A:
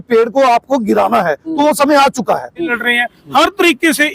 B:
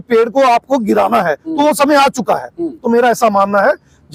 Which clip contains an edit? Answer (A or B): A